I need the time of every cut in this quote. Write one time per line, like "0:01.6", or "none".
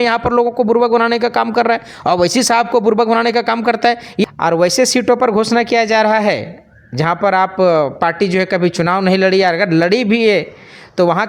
0:04.2